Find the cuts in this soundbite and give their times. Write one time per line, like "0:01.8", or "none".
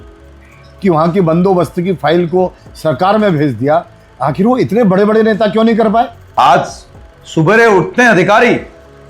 0:06.2